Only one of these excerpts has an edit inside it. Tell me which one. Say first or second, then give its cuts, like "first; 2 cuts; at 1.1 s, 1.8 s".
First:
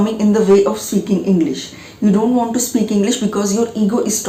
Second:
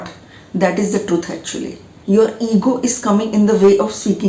second; 1 cut; at 2.0 s